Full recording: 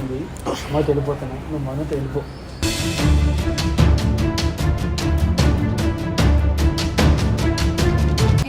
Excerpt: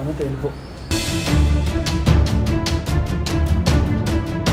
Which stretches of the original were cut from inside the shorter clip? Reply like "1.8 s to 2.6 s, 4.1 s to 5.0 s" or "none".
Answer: none